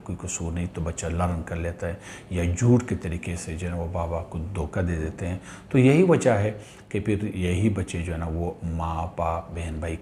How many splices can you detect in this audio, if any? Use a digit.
0